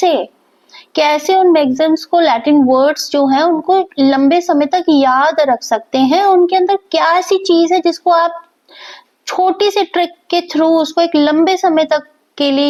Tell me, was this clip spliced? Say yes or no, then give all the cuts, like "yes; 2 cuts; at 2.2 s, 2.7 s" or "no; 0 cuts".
no; 0 cuts